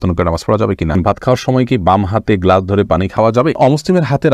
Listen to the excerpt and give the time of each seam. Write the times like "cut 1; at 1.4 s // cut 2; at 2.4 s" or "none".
cut 1; at 1.0 s // cut 2; at 3.2 s